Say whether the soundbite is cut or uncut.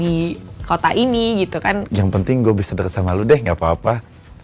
cut